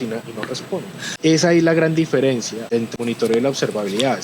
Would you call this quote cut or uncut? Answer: cut